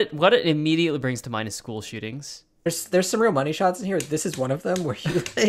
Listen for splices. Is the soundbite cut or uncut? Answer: cut